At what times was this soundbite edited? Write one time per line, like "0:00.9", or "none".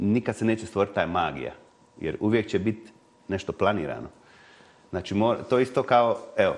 none